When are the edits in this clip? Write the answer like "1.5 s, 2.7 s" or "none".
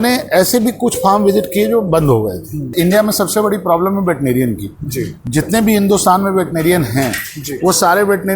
2.7 s